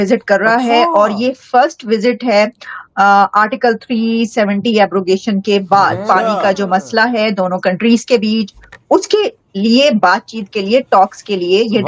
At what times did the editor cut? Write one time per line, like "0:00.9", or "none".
0:06.0